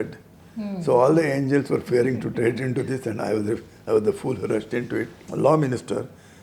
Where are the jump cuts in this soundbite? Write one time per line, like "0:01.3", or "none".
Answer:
0:05.2